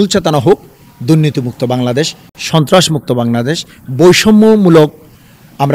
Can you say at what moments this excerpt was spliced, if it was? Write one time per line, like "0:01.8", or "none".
none